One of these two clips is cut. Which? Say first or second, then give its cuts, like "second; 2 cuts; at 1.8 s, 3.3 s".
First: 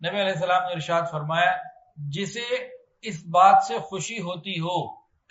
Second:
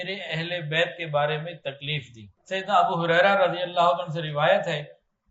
second; 1 cut; at 2.3 s